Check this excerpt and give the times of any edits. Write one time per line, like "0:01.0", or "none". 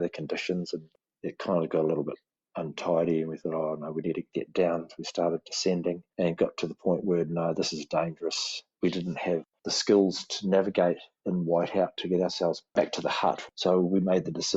0:04.3
0:08.7
0:09.5